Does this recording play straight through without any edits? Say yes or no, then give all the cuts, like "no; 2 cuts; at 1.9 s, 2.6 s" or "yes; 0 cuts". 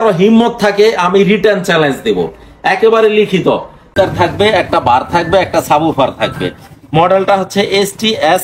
no; 1 cut; at 3.9 s